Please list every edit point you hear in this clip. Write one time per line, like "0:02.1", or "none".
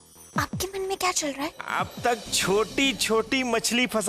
0:01.6